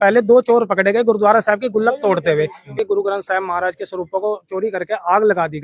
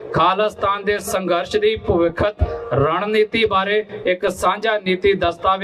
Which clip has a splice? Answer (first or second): first